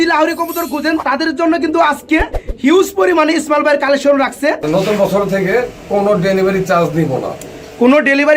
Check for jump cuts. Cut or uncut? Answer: cut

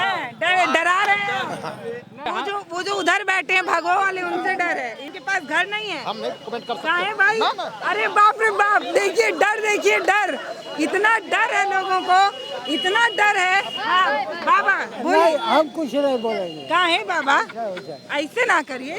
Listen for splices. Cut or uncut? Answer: cut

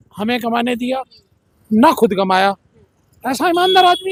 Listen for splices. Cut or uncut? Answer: uncut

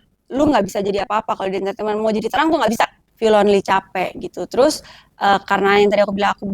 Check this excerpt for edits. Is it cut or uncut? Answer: cut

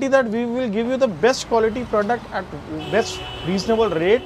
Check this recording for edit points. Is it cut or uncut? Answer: uncut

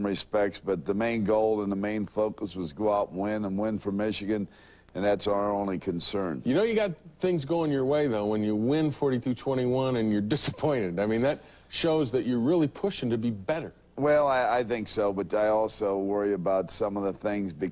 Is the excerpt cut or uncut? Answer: cut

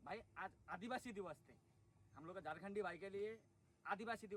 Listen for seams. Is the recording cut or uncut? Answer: uncut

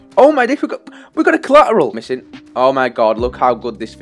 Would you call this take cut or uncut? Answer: cut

